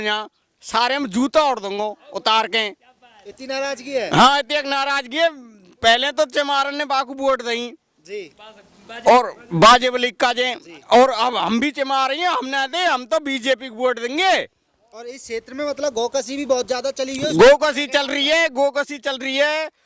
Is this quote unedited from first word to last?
yes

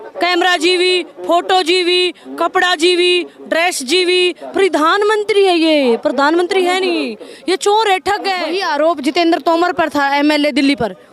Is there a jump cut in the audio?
yes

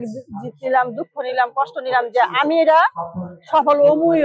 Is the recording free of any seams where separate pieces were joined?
yes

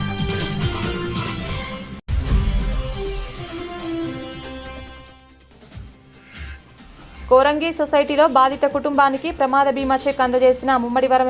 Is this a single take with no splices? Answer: no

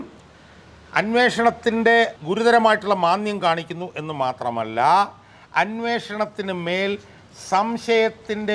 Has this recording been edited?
yes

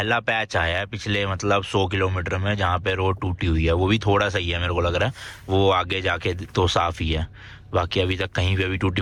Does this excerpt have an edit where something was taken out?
no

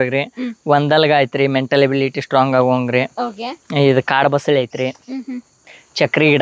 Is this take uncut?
yes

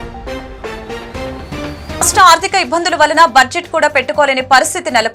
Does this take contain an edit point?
no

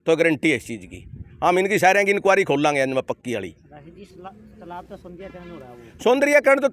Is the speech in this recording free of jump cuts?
yes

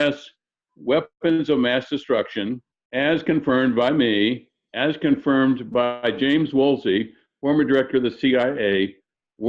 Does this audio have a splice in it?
yes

